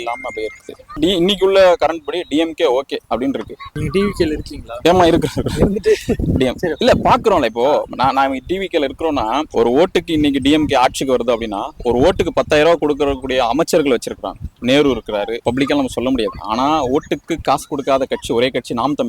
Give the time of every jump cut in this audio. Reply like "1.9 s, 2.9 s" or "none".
1.0 s, 3.8 s, 9.5 s, 15.4 s

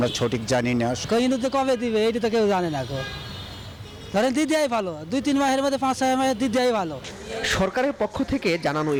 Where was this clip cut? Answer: none

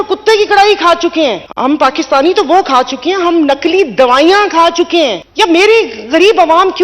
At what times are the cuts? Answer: 1.5 s, 5.2 s

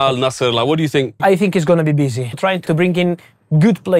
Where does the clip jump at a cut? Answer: 1.2 s, 2.5 s

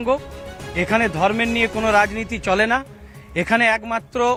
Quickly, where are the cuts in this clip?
none

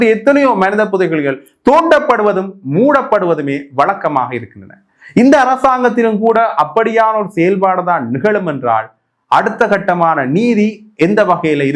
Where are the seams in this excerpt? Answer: none

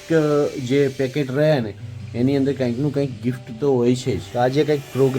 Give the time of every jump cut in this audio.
4.2 s

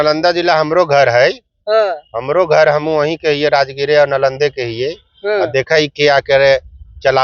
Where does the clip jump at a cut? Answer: none

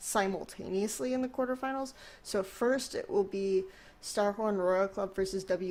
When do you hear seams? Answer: none

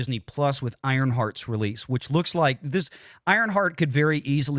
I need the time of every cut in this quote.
none

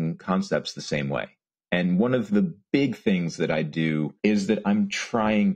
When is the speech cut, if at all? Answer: 2.6 s, 4.1 s

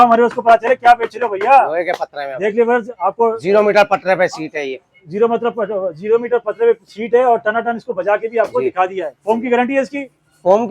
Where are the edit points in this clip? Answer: none

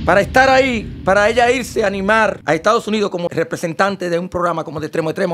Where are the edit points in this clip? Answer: 2.4 s, 3.3 s

